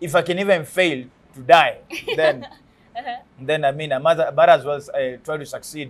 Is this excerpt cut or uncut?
uncut